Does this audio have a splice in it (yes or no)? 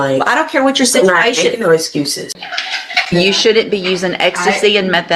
yes